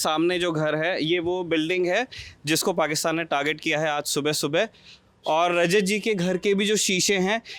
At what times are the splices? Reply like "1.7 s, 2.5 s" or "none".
none

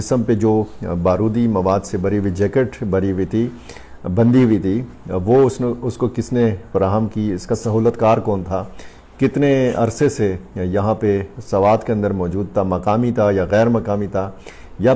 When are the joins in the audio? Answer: none

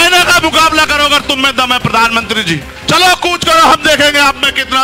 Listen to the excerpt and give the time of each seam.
2.7 s

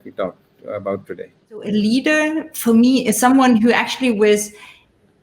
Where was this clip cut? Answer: 1.7 s

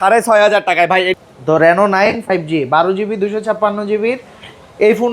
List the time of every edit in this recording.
1.1 s

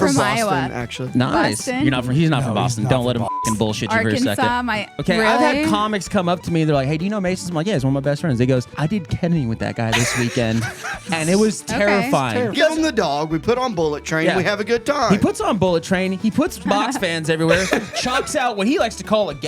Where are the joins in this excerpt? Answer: 4.9 s, 8.7 s, 12.5 s, 16.7 s

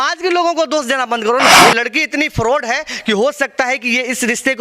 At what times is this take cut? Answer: 1.5 s

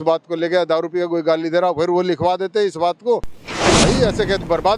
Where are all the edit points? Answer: 3.7 s

